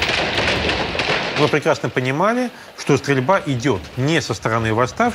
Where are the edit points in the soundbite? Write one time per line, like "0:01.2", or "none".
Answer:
0:01.4